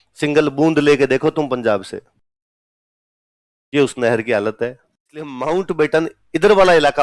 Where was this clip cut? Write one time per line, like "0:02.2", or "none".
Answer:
0:05.3

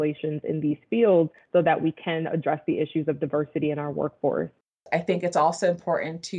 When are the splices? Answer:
0:04.7

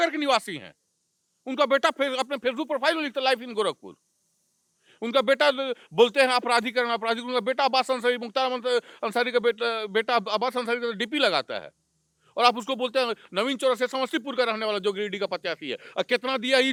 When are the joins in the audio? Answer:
none

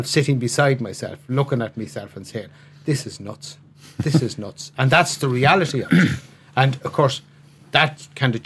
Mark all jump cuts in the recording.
0:07.5

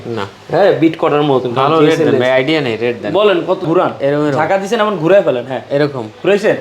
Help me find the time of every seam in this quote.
0:03.7

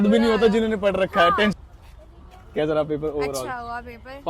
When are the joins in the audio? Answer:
0:01.5

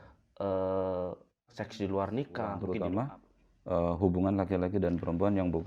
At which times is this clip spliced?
0:02.7

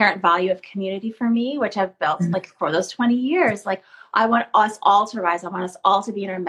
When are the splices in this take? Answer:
none

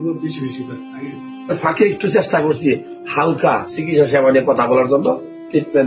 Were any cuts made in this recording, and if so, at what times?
0:01.5

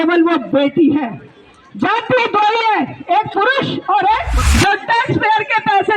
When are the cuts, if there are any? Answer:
0:04.4

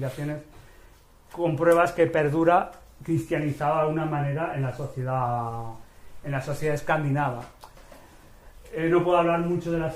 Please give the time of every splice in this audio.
0:05.6

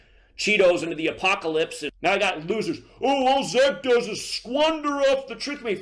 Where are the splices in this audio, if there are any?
0:01.8

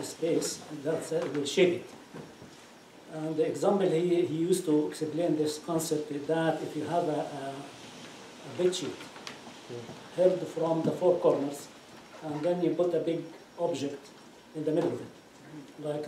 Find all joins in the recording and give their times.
0:03.7

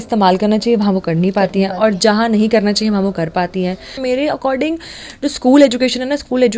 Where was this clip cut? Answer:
0:04.0

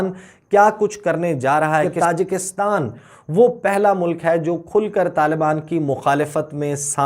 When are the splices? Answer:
0:01.6

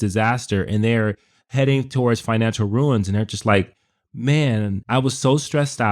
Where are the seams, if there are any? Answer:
0:04.8

